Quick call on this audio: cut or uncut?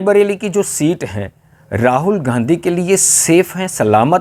uncut